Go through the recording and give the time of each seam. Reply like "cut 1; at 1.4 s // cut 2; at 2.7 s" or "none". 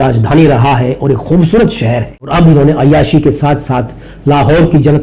cut 1; at 2.1 s

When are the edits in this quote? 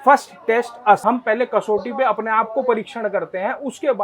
cut 1; at 1.0 s

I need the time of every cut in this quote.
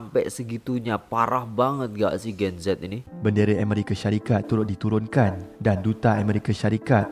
cut 1; at 3.1 s

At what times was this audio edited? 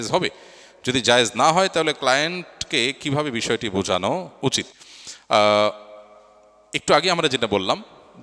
none

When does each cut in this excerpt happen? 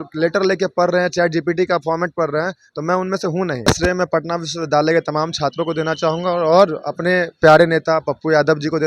cut 1; at 3.7 s

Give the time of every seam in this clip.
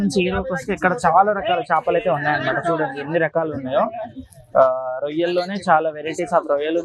none

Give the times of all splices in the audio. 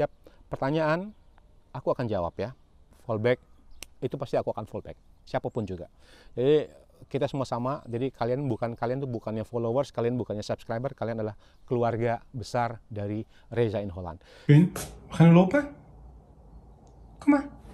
cut 1; at 2.8 s // cut 2; at 14.2 s

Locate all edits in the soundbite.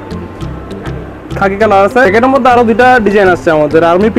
cut 1; at 2.1 s

